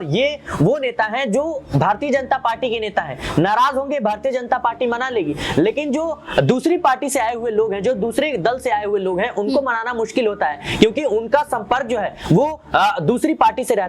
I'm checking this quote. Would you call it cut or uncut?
uncut